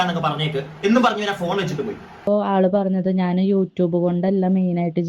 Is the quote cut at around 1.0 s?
no; 1 cut; at 2.3 s

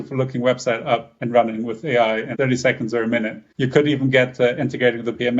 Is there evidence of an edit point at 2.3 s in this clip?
yes; 3 cuts; at 1.1 s, 2.3 s, 3.4 s

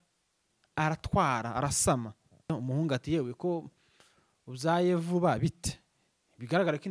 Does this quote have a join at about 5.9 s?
no; 1 cut; at 2.5 s

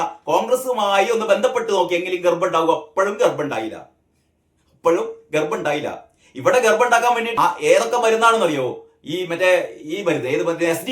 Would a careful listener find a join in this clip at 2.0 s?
no; 1 cut; at 7.3 s

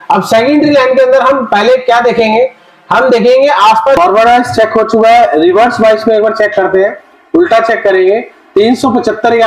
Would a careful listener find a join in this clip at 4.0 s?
yes; 1 cut; at 4.0 s

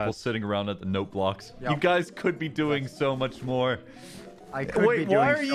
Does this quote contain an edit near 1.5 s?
yes; 1 cut; at 1.5 s

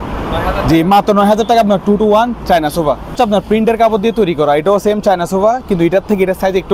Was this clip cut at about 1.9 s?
no; 1 cut; at 3.2 s

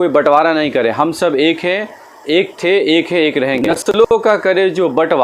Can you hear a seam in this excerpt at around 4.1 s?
yes; 1 cut; at 4.1 s

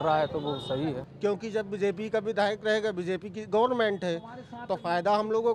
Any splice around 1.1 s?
yes; 1 cut; at 1.1 s

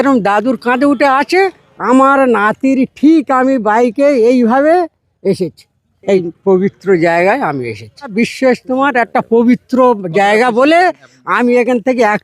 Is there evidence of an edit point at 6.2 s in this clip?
yes; 3 cuts; at 1.7 s, 6.2 s, 8.1 s

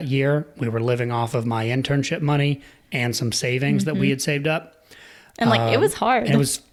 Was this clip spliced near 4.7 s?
no; 0 cuts

